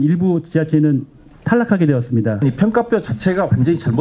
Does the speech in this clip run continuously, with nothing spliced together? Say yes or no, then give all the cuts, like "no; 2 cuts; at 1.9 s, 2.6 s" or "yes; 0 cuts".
no; 1 cut; at 2.4 s